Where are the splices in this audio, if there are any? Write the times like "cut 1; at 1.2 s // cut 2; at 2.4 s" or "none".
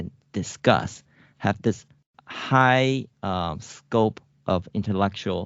none